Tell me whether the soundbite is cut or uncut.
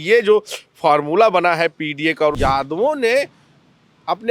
cut